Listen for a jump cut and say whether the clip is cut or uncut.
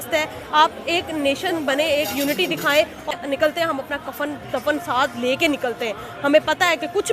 cut